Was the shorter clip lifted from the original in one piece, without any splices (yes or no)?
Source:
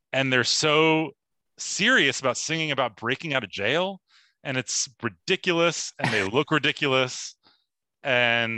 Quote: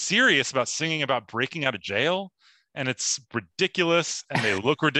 yes